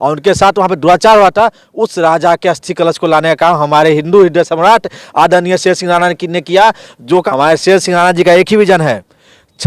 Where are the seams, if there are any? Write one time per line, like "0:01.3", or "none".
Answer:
0:07.3

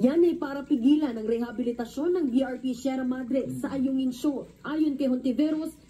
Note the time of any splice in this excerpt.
0:04.5

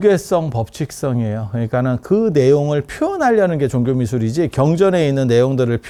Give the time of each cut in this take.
none

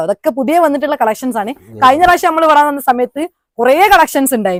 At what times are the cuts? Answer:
none

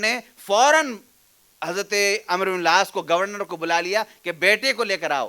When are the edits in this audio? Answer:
none

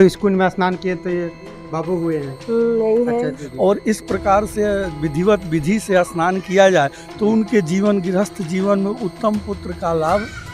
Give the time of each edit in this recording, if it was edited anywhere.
0:03.4

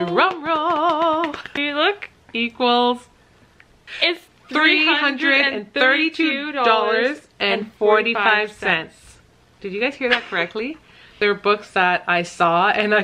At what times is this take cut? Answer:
0:01.5
0:03.9
0:11.2

